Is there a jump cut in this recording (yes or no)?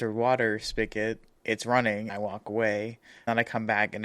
yes